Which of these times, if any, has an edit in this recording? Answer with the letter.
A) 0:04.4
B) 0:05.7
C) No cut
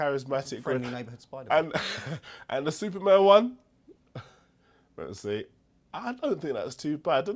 C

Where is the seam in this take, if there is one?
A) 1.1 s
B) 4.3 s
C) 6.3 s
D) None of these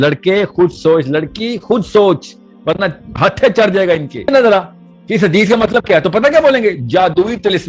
B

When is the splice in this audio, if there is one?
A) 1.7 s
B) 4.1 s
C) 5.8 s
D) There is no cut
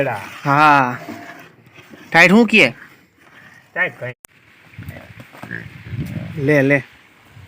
B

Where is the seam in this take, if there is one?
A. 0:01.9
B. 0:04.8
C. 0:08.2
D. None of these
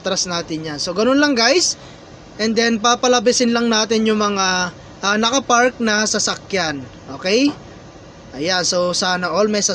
D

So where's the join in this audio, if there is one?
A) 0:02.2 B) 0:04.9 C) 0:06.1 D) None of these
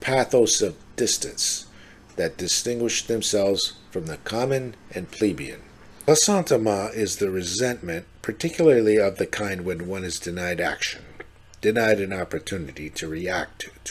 C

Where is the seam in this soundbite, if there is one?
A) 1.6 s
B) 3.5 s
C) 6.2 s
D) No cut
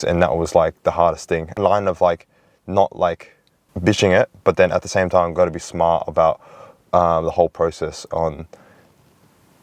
A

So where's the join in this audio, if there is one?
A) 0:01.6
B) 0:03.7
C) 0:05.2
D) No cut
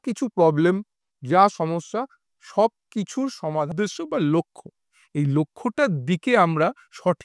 B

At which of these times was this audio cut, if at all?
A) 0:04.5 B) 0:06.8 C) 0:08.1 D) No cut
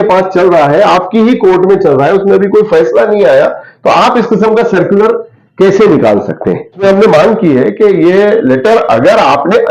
B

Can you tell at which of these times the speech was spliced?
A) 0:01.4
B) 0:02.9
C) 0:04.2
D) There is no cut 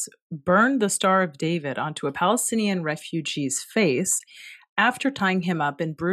D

